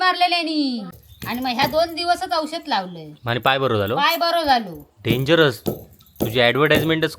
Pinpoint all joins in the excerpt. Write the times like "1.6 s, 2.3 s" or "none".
1.0 s